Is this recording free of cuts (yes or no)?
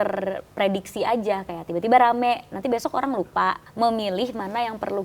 no